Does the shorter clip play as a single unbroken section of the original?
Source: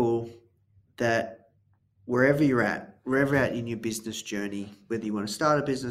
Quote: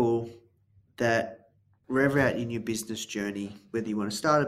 no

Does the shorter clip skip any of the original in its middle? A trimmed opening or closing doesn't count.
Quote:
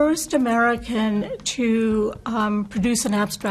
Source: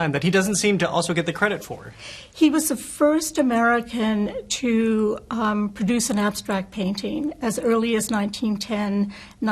no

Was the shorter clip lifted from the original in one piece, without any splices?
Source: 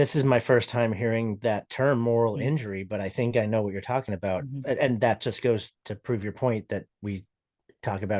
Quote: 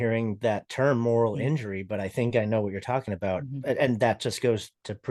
yes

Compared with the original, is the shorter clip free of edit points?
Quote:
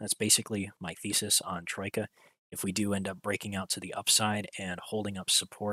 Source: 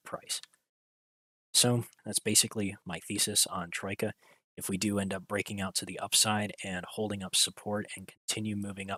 yes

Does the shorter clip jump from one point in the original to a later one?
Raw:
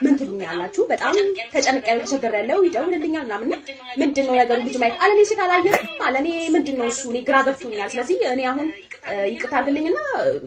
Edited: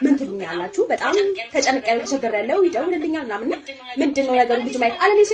no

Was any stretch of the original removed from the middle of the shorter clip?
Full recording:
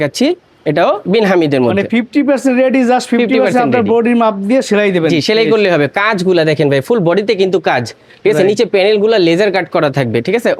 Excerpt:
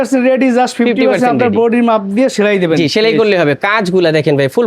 no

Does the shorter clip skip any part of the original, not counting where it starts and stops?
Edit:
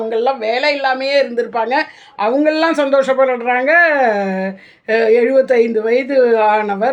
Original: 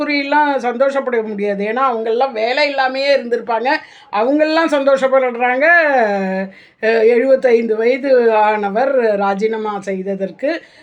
no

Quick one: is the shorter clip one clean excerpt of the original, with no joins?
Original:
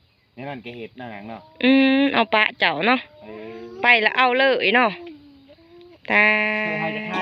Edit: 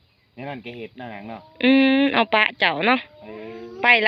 yes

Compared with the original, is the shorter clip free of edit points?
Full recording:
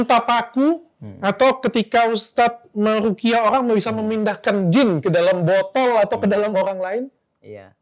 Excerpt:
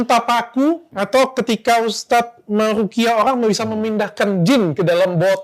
no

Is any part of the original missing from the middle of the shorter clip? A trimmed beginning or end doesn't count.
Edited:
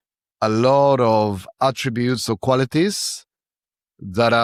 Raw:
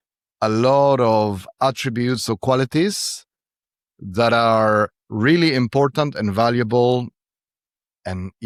no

